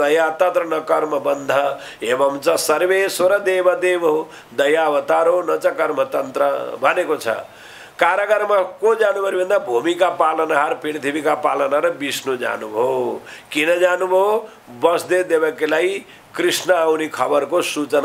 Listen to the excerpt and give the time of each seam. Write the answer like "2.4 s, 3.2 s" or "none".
none